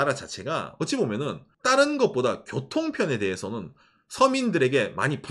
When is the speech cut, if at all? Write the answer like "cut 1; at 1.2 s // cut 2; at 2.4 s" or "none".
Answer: cut 1; at 1.5 s